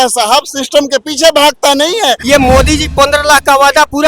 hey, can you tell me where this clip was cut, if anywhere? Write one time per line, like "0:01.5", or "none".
0:02.2